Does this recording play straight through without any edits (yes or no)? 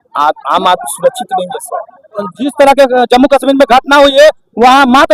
no